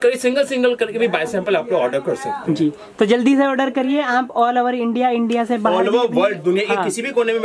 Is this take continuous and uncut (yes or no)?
yes